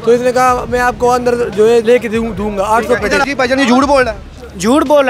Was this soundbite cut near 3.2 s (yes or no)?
yes